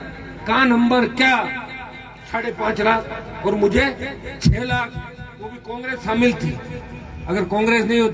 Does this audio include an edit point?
no; 0 cuts

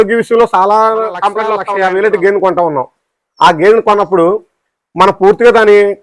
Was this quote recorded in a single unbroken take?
no; 1 cut; at 1.6 s

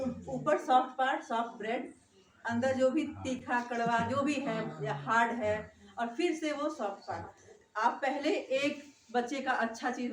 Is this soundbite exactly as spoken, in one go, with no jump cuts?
yes; 0 cuts

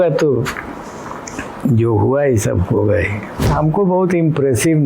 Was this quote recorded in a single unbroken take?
no; 1 cut; at 3.5 s

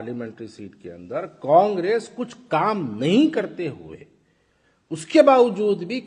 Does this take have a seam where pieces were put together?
no; 0 cuts

